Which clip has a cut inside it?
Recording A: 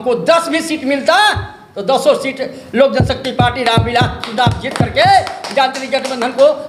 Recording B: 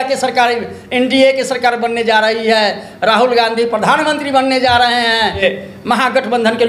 B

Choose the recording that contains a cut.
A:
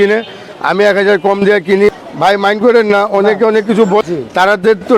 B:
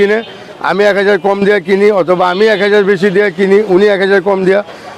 A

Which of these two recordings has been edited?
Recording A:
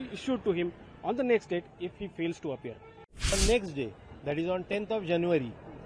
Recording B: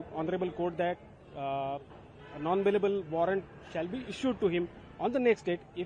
A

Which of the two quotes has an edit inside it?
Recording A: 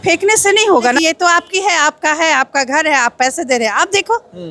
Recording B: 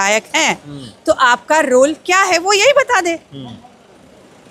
A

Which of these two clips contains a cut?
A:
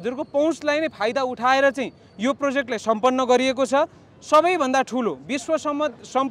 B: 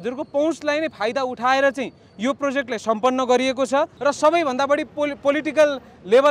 B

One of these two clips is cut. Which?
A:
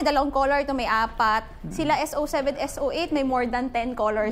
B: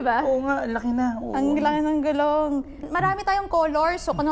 B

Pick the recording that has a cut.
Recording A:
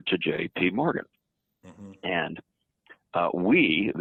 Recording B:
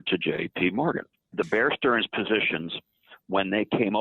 B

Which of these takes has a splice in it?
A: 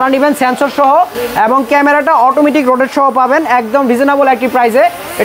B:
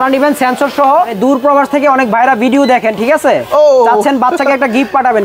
B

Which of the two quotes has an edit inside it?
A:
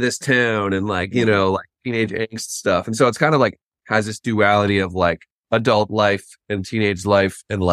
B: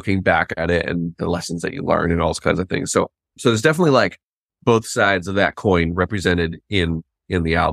A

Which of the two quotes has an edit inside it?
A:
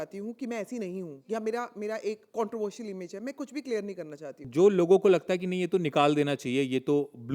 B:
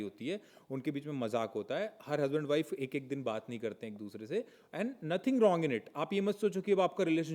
A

